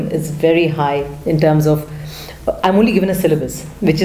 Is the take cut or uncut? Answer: uncut